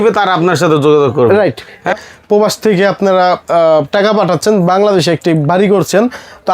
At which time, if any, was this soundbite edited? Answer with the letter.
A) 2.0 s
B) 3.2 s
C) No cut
A